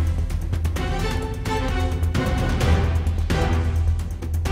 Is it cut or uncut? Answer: uncut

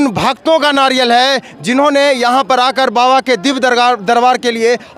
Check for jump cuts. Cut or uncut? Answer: uncut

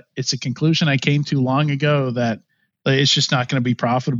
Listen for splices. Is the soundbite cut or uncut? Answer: uncut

